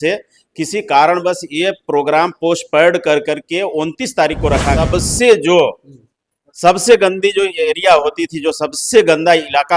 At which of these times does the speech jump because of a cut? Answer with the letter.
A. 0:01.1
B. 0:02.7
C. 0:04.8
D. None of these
C